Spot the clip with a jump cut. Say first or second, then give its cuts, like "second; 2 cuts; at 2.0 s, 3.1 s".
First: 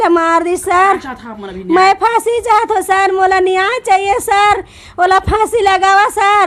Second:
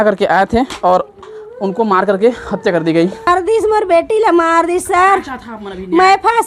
second; 1 cut; at 3.3 s